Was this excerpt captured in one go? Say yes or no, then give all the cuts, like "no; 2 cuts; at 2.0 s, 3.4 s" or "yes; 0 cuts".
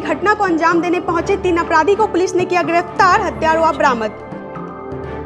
yes; 0 cuts